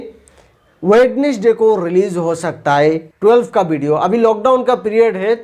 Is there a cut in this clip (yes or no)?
yes